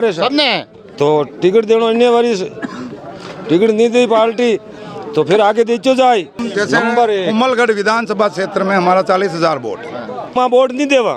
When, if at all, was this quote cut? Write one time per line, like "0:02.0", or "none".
0:06.4
0:10.3